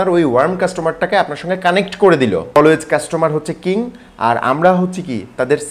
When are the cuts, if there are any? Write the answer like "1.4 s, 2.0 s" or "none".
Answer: 2.6 s